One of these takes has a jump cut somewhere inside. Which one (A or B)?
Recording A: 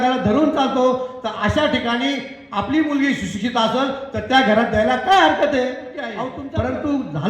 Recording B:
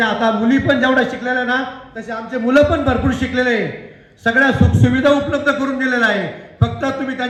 A